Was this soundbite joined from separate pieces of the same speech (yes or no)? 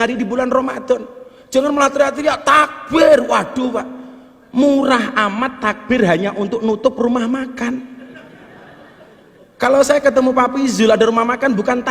no